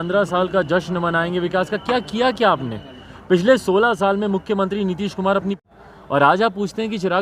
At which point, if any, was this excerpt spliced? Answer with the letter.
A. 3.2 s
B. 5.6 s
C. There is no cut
B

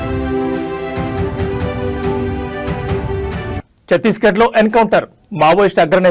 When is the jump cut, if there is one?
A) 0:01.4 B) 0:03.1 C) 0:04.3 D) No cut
B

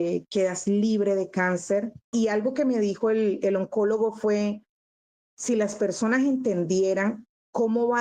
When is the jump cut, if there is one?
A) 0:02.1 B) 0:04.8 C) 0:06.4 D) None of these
A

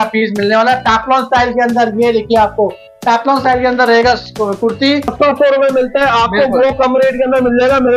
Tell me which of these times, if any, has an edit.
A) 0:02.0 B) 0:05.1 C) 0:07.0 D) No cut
B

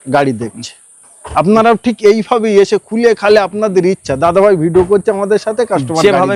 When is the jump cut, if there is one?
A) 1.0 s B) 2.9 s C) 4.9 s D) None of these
D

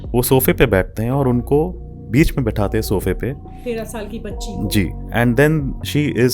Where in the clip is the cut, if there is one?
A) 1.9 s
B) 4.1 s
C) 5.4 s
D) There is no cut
D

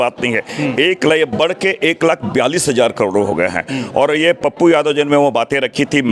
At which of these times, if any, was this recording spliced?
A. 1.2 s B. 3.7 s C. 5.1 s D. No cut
D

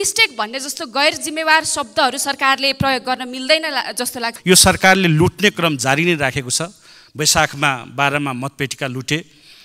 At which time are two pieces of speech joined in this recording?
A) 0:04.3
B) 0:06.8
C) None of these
A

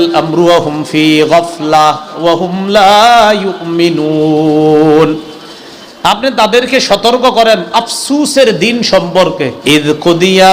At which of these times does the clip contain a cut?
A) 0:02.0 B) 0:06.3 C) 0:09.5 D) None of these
C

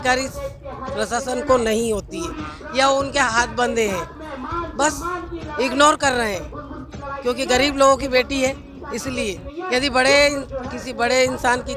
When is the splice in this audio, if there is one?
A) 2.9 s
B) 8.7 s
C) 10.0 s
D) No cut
D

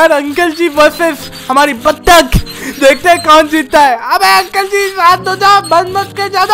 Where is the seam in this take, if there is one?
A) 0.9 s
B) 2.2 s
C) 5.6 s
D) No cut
D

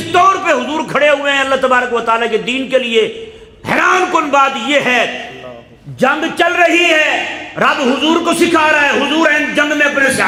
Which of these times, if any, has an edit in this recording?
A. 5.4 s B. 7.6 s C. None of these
C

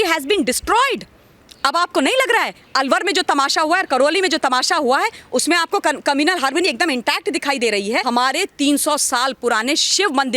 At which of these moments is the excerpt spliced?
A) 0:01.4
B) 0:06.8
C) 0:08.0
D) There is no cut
C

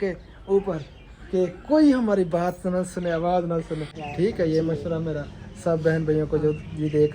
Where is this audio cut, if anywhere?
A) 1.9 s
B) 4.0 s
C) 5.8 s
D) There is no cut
B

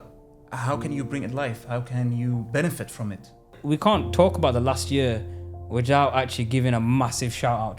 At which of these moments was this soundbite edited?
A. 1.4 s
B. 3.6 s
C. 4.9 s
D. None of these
B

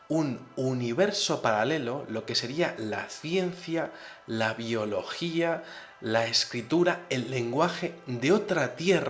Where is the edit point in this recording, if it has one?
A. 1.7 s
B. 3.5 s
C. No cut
B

